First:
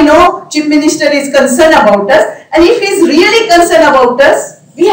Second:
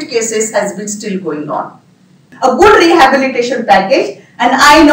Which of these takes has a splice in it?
second; 1 cut; at 2.3 s

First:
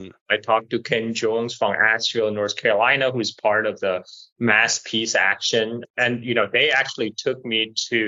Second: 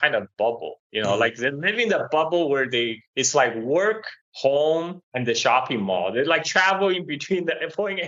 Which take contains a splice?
first; 1 cut; at 5.8 s

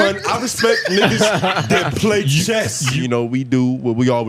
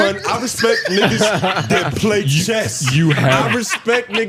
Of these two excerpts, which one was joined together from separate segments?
first; 1 cut; at 2.9 s

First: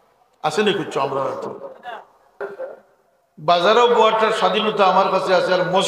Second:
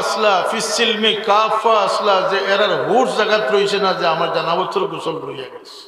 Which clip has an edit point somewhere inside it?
first; 1 cut; at 2.4 s

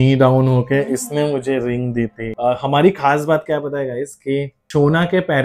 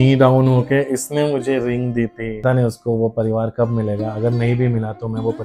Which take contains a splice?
second; 1 cut; at 2.4 s

